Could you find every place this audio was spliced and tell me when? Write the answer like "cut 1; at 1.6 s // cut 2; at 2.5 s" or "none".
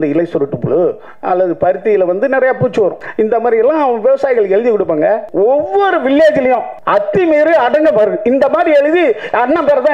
cut 1; at 3.0 s // cut 2; at 5.3 s // cut 3; at 6.7 s